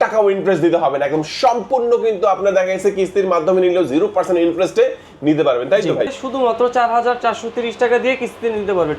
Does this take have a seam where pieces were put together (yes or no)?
yes